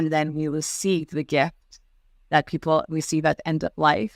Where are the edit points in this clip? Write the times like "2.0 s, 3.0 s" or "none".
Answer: none